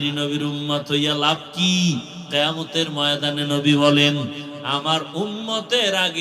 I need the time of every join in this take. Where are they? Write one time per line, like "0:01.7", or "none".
none